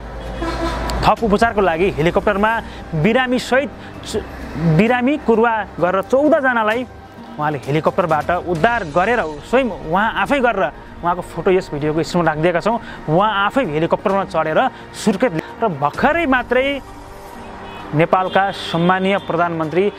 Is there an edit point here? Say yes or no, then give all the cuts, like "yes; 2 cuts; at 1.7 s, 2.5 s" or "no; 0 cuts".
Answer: yes; 1 cut; at 15.3 s